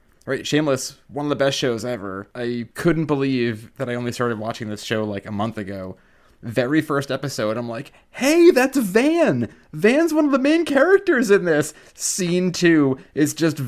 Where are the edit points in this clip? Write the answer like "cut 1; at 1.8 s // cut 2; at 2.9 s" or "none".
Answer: cut 1; at 1.0 s // cut 2; at 2.6 s // cut 3; at 3.7 s